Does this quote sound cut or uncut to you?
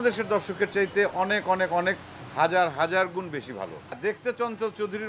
cut